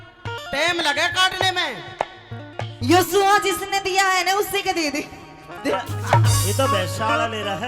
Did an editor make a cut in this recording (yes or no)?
yes